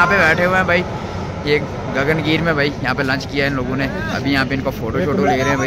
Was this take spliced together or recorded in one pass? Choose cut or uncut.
uncut